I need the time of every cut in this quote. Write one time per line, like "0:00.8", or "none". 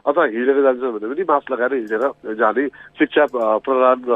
0:02.7